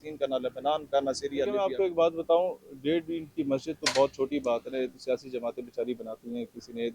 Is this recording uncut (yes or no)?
no